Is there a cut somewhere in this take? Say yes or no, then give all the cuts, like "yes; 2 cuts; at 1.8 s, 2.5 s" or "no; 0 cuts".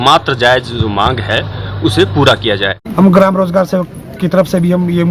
yes; 1 cut; at 2.8 s